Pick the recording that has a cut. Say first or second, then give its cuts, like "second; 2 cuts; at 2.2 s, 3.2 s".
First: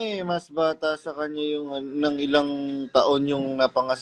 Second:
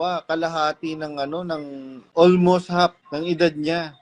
second; 2 cuts; at 2.0 s, 3.0 s